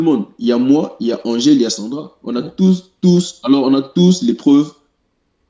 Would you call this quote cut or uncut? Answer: uncut